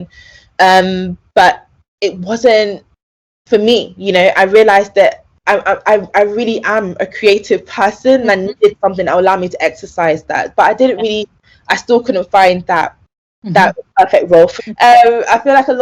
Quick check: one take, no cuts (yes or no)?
no